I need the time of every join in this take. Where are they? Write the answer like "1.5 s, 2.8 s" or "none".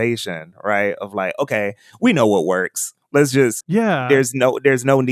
3.7 s